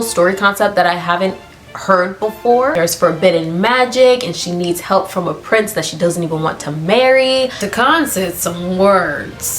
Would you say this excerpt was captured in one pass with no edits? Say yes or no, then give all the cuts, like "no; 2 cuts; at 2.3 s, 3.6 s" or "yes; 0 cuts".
no; 1 cut; at 7.6 s